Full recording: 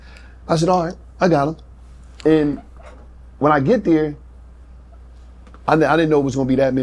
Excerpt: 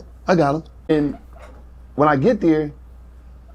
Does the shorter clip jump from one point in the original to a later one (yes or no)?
yes